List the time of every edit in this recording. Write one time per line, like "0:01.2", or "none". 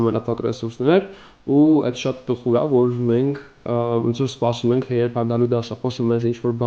none